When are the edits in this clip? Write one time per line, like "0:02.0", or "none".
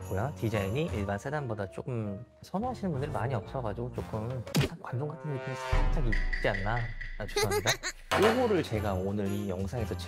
0:07.9